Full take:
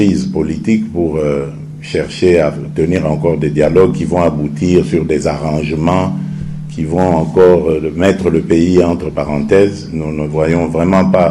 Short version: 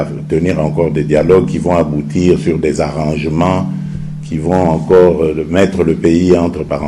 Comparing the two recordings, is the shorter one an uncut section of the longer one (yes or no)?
yes